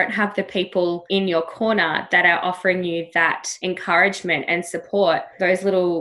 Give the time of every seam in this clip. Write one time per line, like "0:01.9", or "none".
0:01.0
0:03.5